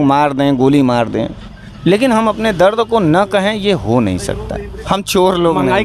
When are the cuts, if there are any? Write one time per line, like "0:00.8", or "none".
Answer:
0:04.7